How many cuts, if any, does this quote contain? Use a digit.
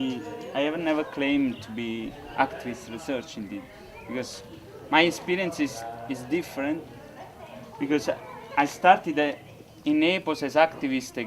1